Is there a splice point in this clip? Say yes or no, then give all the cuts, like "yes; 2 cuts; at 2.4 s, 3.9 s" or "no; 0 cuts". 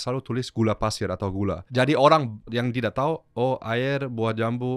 yes; 2 cuts; at 1.7 s, 2.5 s